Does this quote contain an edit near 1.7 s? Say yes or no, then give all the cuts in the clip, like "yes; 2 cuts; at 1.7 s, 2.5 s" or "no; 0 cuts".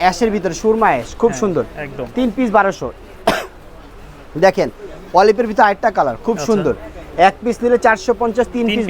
no; 0 cuts